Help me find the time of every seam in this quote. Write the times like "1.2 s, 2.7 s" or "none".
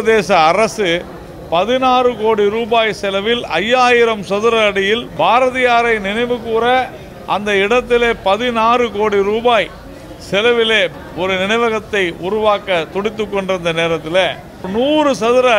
5.1 s, 10.9 s, 14.7 s